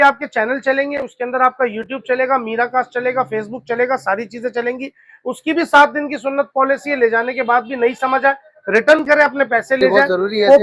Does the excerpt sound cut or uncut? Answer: uncut